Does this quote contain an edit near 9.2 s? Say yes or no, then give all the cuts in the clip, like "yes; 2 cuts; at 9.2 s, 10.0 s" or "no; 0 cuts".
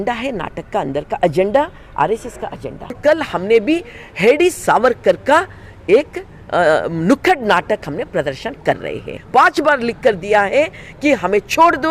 yes; 2 cuts; at 3.0 s, 9.2 s